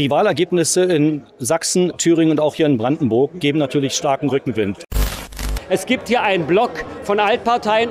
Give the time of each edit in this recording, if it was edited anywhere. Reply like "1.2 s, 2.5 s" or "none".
5.3 s